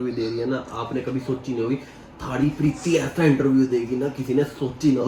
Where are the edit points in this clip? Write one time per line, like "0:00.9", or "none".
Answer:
none